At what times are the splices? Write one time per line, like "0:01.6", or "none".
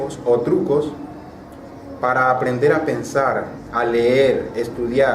0:02.2